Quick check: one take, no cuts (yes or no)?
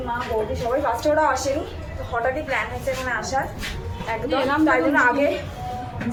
yes